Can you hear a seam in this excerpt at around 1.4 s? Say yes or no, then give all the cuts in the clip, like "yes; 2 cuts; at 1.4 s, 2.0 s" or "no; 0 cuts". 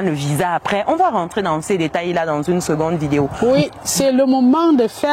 no; 1 cut; at 3.3 s